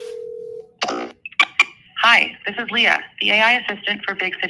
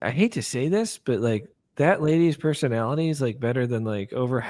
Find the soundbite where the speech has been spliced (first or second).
first